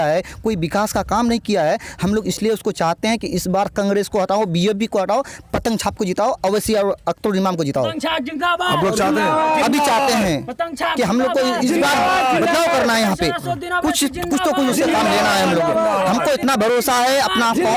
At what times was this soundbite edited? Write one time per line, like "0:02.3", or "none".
none